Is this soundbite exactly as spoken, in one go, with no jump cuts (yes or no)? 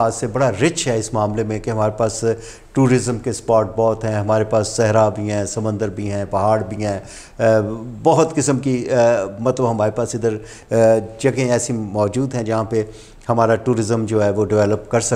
yes